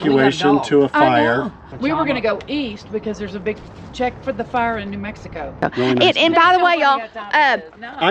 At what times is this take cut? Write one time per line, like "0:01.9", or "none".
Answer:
0:01.7
0:05.6